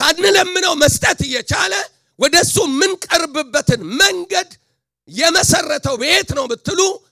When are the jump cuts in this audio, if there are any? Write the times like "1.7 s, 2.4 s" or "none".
none